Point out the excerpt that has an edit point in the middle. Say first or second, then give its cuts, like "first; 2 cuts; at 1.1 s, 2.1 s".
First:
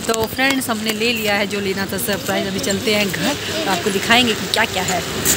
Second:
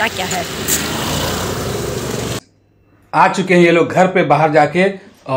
second; 1 cut; at 2.4 s